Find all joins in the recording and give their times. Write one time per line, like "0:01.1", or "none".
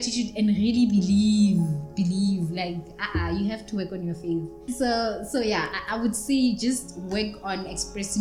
0:04.5